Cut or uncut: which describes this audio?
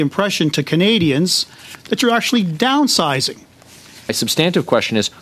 cut